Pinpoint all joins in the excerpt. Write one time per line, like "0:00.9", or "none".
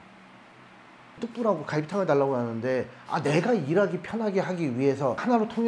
0:01.2